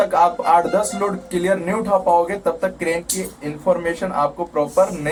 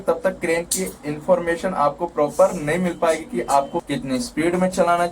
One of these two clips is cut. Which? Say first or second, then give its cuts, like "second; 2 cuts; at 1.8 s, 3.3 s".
second; 1 cut; at 3.8 s